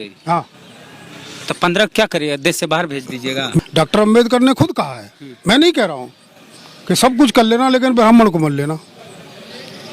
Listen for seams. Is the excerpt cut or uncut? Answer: cut